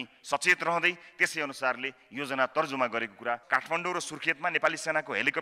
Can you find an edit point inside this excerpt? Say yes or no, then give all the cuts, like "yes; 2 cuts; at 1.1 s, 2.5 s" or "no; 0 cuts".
yes; 1 cut; at 3.4 s